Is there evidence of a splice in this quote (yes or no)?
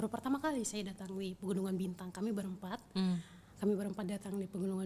no